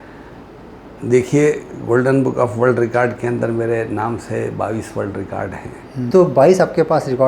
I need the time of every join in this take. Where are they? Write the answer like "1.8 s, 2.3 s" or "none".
5.9 s